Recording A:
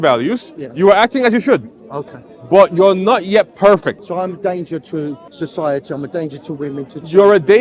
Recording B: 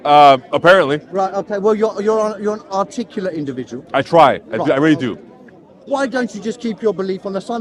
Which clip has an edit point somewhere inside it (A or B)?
A